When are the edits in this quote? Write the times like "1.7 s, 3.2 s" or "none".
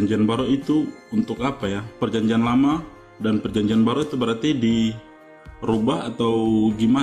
2.0 s